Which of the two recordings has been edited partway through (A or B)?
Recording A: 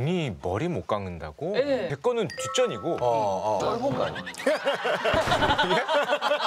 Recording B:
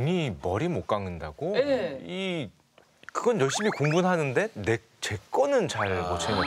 A